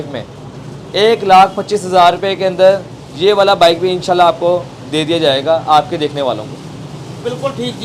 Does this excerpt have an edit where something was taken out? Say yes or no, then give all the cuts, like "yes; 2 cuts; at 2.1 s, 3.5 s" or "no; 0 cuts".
no; 0 cuts